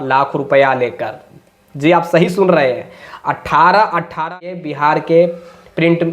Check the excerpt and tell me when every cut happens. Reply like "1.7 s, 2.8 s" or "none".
4.5 s